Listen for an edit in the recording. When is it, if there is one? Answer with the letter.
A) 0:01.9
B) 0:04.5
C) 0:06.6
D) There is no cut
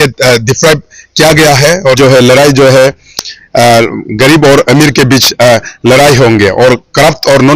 A